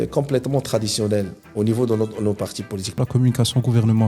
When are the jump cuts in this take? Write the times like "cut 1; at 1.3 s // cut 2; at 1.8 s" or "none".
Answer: cut 1; at 1.4 s // cut 2; at 3.0 s